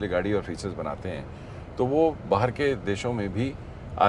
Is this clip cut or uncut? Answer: uncut